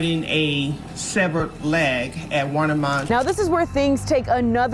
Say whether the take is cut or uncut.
cut